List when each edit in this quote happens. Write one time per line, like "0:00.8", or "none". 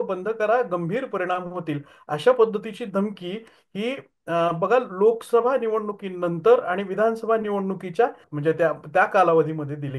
0:08.3